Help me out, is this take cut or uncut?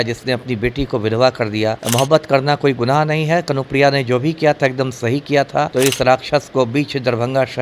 cut